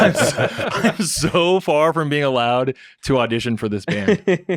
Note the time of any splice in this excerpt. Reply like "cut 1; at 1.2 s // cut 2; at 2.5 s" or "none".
none